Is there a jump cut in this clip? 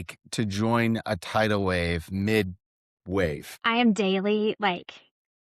yes; 1 cut; at 3.5 s

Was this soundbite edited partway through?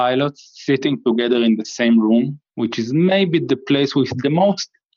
no; 0 cuts

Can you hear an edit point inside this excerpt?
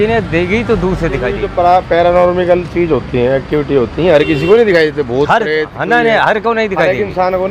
yes; 1 cut; at 1.4 s

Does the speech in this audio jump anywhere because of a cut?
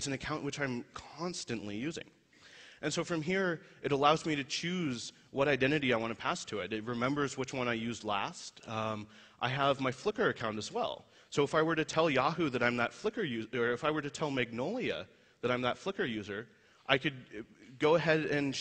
yes; 1 cut; at 10.7 s

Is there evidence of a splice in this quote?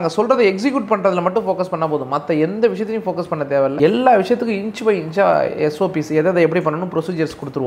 no; 0 cuts

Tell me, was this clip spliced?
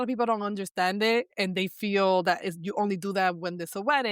no; 0 cuts

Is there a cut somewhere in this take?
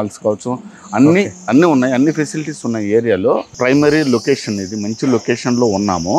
yes; 1 cut; at 3.5 s

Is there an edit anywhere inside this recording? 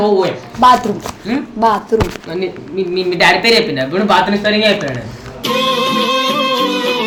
no; 0 cuts

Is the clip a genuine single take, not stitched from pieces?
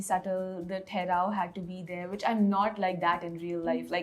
yes; 0 cuts

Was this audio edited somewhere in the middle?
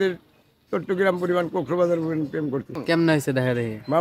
yes; 1 cut; at 2.8 s

